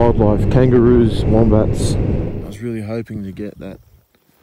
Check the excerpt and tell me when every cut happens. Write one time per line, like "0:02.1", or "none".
0:01.9